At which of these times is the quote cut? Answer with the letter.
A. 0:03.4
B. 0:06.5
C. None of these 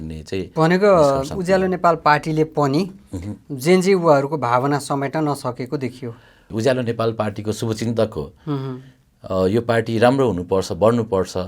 B